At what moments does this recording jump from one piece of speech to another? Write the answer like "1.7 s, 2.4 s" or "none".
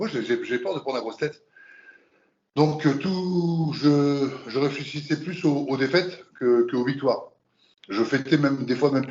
none